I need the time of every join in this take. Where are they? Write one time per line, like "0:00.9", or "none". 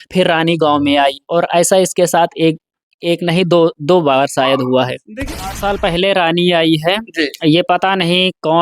0:05.2